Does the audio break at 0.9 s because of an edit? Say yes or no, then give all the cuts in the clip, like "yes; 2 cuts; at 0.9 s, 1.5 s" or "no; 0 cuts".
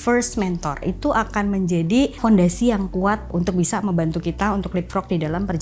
yes; 3 cuts; at 0.9 s, 2.2 s, 3.3 s